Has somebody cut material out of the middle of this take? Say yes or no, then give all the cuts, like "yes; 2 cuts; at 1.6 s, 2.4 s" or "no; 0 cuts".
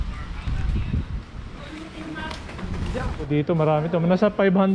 yes; 1 cut; at 3.3 s